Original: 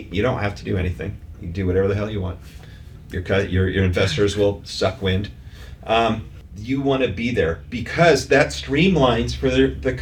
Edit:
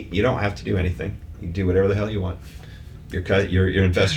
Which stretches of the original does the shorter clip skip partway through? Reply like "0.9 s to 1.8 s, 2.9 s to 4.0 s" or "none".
none